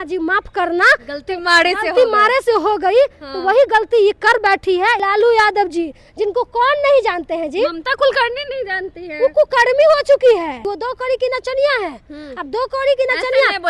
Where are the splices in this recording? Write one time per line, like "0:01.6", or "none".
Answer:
0:05.0
0:10.7